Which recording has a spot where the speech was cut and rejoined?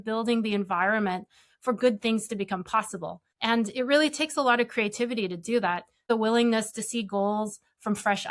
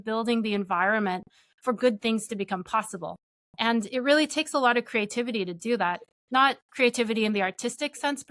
first; 2 cuts; at 3.2 s, 6.1 s

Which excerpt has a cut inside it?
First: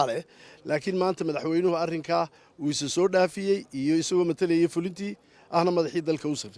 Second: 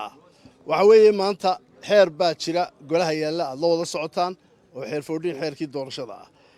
first; 1 cut; at 5.6 s

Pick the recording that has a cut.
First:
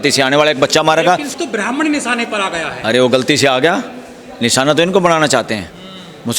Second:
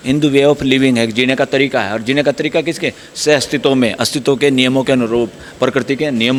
first; 1 cut; at 1.3 s

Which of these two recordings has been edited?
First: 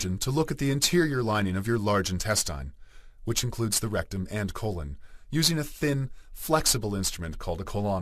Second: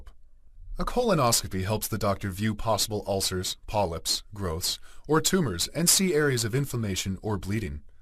second; 1 cut; at 2.6 s

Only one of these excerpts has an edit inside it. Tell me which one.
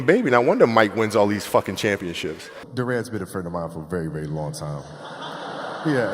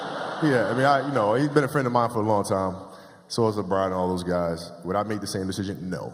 first; 1 cut; at 2.6 s

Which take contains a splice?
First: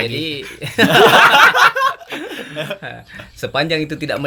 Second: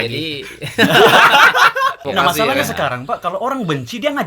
second; 1 cut; at 2.0 s

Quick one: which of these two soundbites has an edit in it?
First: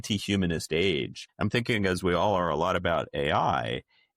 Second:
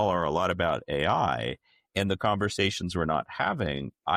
first; 1 cut; at 1.2 s

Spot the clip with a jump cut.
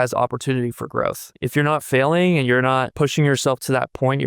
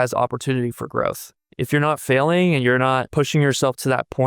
first; 1 cut; at 1.3 s

